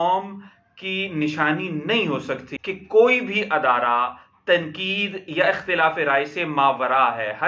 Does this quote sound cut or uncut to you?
cut